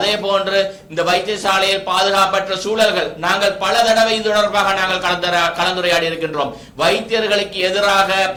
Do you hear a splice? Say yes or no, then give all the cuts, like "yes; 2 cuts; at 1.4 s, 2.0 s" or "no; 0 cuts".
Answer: no; 0 cuts